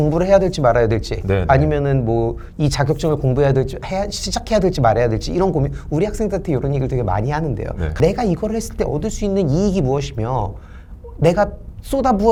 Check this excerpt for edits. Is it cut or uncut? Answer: uncut